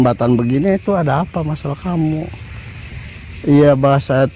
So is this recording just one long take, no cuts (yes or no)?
yes